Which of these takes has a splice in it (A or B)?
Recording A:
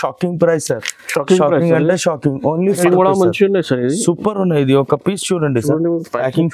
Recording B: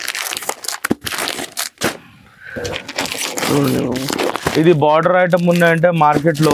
A